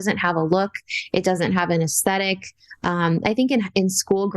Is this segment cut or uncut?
uncut